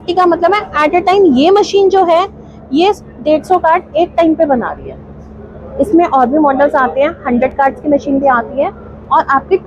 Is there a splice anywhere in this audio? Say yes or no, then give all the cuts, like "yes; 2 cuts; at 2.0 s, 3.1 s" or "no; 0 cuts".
no; 0 cuts